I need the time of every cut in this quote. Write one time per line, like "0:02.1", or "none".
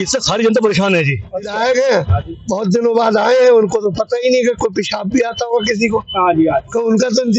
0:01.5